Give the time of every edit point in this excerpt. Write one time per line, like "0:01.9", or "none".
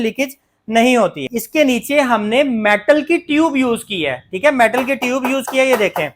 0:01.3